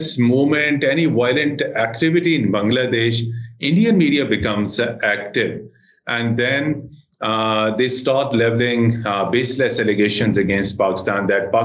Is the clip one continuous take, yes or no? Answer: yes